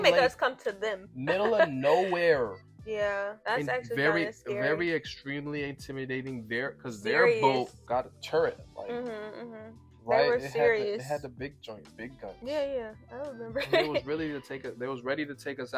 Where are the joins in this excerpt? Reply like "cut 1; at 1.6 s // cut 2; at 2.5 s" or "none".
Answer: none

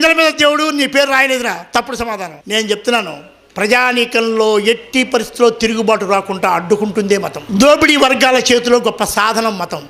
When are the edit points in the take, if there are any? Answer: cut 1; at 2.3 s // cut 2; at 7.4 s

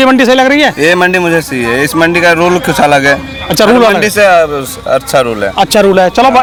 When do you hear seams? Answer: none

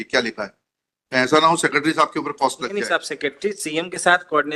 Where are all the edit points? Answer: none

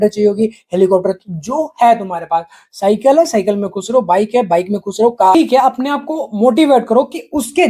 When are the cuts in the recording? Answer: cut 1; at 5.3 s

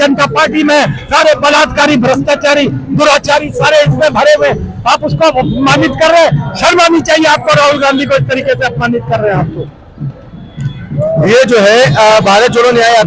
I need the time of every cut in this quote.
none

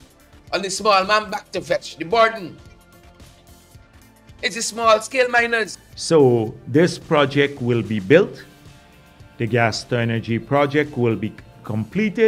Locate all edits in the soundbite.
cut 1; at 5.8 s

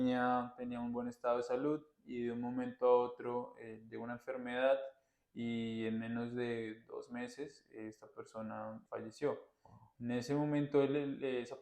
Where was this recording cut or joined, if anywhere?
cut 1; at 8.9 s

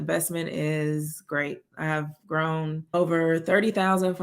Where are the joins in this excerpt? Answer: cut 1; at 2.9 s

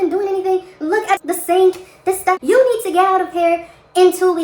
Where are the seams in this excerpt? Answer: cut 1; at 2.4 s

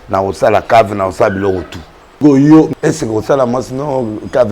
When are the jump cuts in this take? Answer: cut 1; at 2.0 s // cut 2; at 2.7 s

